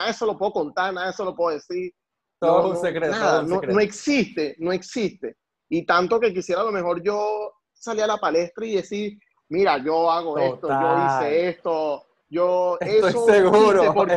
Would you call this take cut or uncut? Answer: uncut